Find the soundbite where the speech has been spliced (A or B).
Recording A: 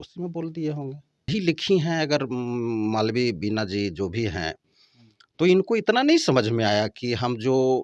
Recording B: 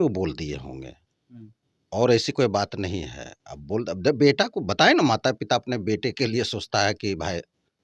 A